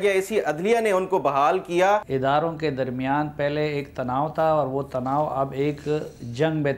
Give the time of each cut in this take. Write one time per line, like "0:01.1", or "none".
0:02.1